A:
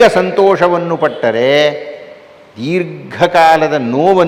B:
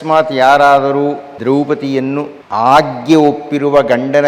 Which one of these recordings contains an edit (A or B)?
B